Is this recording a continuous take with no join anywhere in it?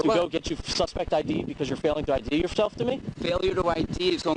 yes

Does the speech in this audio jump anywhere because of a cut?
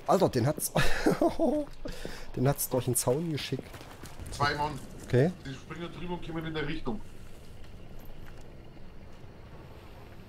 yes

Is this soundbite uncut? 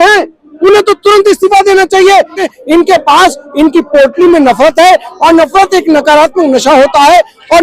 no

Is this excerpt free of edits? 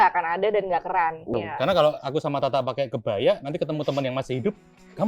no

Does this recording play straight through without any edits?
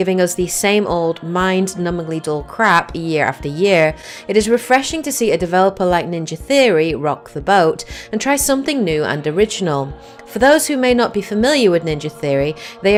yes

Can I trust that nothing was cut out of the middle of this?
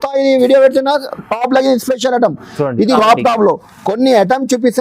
no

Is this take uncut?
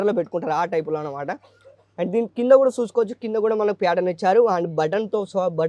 yes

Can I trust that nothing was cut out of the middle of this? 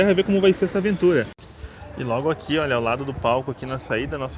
yes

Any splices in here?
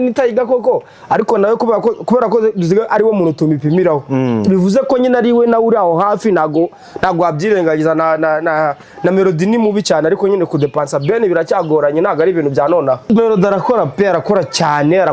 yes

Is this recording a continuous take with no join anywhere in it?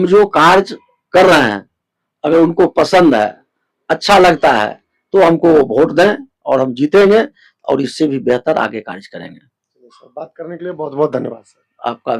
yes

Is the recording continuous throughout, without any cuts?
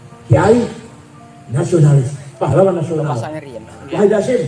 yes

